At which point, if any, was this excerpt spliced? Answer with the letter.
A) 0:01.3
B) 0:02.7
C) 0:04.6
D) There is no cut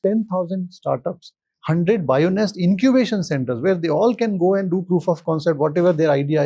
D